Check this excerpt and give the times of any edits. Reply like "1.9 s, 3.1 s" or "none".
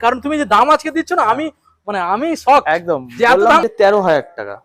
3.6 s